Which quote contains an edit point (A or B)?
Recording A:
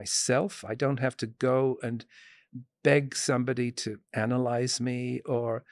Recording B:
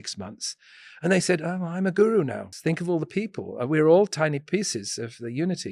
B